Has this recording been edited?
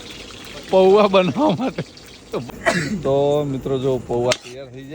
yes; 1 cut; at 2.5 s

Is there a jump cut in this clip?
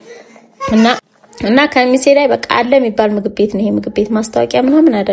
no; 0 cuts

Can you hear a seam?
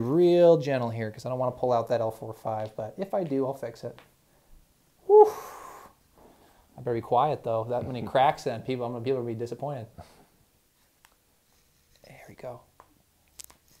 no; 0 cuts

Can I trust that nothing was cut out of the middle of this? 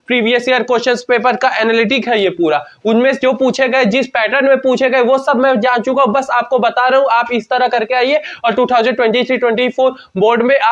yes; 0 cuts

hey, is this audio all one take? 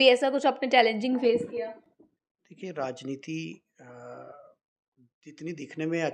yes; 0 cuts

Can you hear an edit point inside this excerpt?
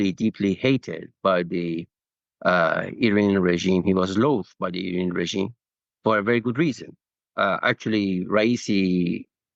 no; 0 cuts

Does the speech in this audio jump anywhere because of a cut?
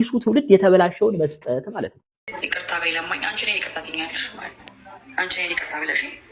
yes; 1 cut; at 2.3 s

